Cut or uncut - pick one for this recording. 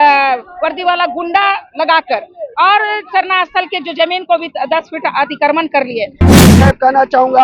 cut